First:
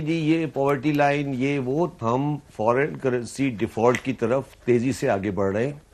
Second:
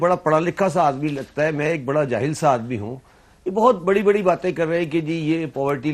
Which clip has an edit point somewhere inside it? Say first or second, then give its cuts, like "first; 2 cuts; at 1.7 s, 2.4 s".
first; 1 cut; at 1.9 s